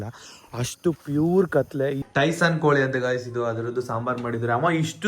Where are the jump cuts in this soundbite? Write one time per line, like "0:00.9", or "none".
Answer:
0:02.0